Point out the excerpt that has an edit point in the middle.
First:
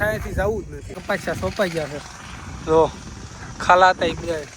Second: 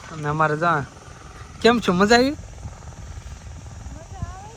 first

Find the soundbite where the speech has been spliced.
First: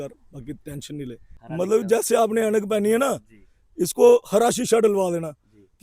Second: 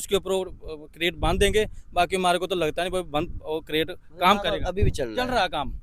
first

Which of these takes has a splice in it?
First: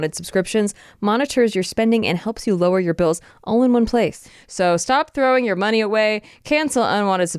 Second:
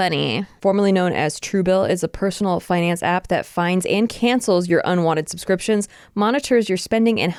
first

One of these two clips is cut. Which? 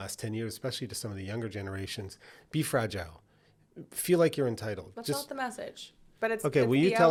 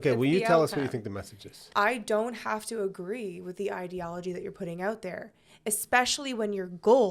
second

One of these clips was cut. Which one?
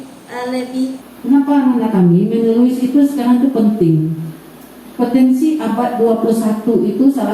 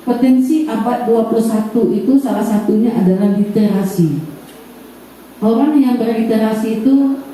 first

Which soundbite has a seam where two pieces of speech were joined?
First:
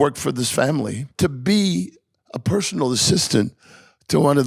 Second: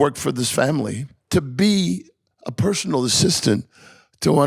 first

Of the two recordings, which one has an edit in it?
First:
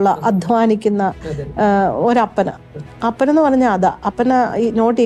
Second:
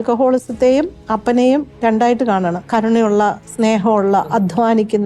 second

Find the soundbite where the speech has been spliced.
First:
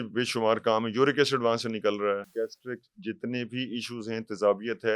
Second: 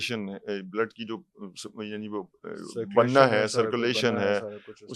first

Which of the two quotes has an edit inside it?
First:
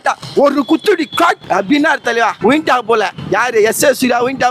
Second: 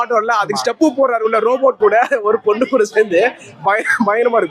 first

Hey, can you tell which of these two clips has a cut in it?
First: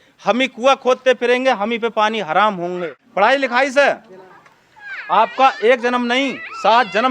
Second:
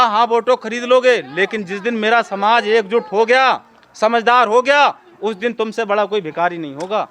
first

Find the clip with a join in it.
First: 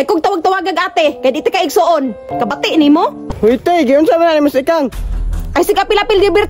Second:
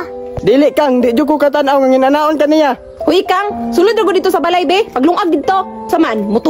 first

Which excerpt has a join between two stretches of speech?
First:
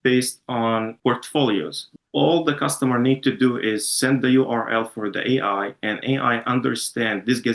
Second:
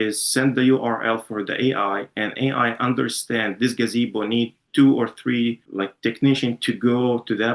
first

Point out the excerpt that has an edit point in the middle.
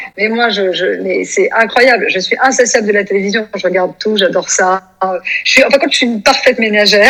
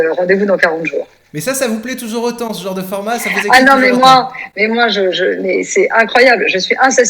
second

